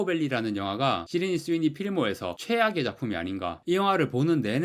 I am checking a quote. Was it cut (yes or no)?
yes